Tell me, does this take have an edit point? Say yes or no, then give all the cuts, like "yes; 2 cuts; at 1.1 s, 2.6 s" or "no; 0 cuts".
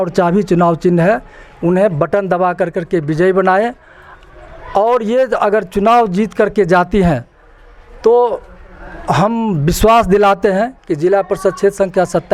no; 0 cuts